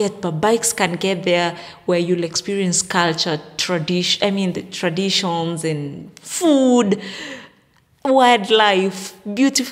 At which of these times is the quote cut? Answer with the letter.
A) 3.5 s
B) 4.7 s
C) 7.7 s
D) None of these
D